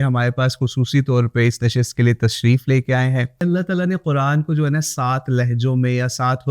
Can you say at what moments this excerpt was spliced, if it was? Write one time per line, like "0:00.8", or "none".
0:03.4